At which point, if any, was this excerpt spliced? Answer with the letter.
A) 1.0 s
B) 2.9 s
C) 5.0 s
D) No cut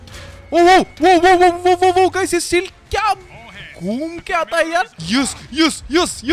C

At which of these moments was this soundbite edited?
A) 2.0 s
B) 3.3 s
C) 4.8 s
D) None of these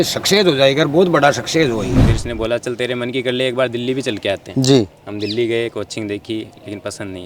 A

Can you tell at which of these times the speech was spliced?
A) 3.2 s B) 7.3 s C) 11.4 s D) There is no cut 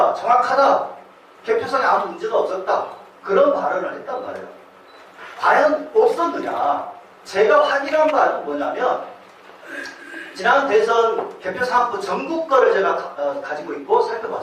A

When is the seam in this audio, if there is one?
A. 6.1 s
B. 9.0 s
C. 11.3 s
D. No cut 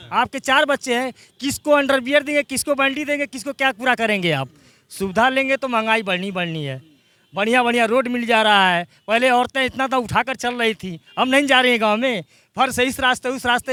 D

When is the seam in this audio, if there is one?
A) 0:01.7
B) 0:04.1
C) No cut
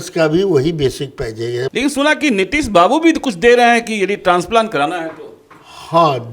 A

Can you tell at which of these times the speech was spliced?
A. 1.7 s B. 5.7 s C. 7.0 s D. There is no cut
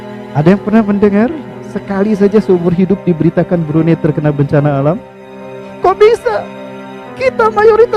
B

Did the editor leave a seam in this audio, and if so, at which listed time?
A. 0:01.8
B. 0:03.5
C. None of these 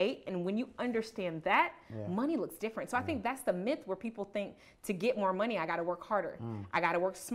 C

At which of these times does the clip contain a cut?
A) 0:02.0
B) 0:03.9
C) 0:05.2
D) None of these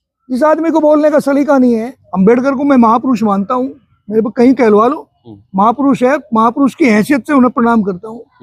A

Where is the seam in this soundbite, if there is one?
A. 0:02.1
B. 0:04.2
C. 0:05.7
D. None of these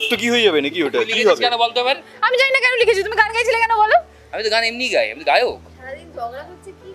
D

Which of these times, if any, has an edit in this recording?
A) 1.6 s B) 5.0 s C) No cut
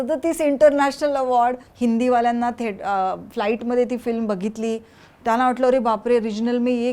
A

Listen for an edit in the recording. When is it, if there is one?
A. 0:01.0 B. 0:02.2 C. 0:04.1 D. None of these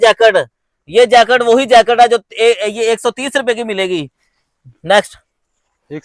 D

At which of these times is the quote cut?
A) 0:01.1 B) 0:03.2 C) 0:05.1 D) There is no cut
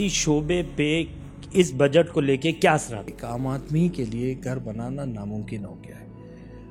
B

